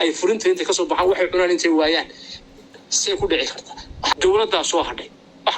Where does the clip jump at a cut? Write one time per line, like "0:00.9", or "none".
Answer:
0:04.1